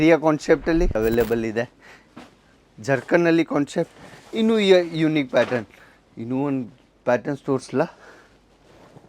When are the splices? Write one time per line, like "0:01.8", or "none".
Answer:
0:00.9